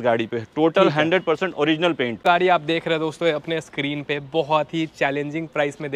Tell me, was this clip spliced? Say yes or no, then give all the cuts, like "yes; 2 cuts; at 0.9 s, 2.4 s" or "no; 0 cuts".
yes; 1 cut; at 2.2 s